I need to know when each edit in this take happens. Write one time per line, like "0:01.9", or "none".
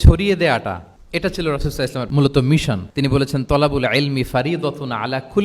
0:00.9
0:02.1
0:02.9